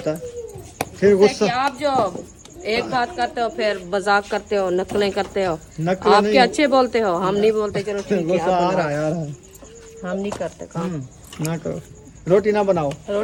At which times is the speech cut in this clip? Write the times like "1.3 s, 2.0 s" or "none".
none